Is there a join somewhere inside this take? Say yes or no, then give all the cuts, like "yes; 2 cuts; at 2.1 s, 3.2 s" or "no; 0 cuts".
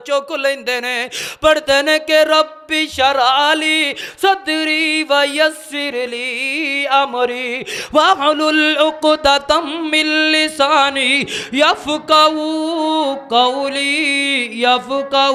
no; 0 cuts